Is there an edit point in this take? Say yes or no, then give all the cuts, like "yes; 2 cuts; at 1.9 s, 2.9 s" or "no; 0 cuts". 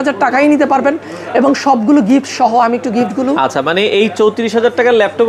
no; 0 cuts